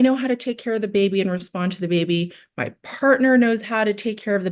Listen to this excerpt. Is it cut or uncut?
uncut